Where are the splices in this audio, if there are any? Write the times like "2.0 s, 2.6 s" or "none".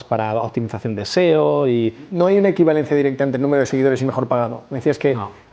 2.1 s